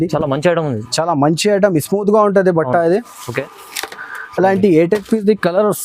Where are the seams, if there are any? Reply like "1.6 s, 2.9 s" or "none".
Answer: 3.3 s